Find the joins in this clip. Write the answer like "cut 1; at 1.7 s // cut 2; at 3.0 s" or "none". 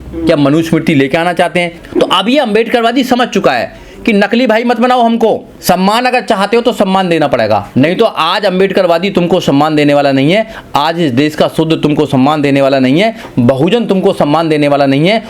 cut 1; at 1.8 s // cut 2; at 5.5 s // cut 3; at 7.7 s